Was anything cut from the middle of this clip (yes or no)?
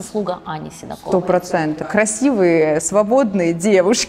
yes